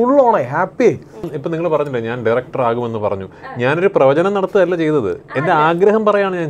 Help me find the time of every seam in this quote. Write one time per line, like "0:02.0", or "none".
0:01.3